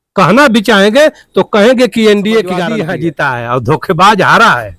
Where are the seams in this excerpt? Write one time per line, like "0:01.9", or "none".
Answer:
0:02.7